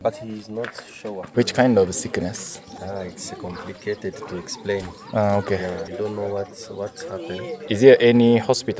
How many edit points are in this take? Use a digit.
4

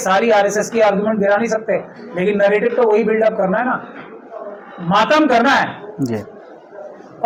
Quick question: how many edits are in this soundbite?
0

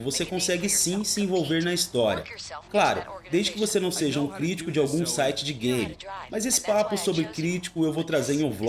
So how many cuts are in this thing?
1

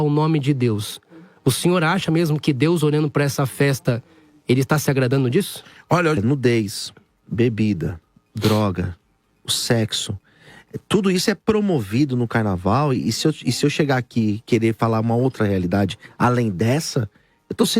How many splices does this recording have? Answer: 1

